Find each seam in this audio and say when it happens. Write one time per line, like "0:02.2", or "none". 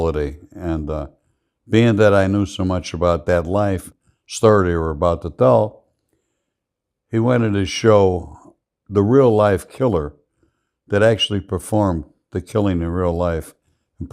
0:03.9